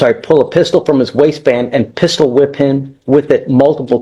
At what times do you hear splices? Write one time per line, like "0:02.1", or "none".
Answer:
none